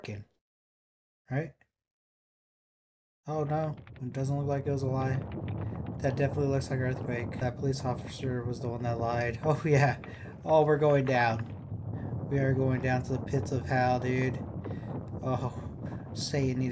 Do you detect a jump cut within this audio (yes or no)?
yes